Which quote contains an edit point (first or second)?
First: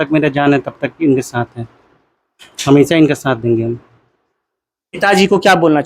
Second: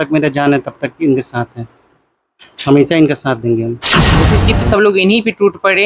second